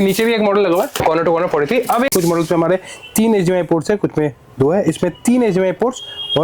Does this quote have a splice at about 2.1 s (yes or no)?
yes